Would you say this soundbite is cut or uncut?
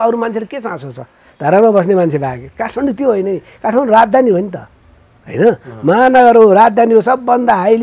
uncut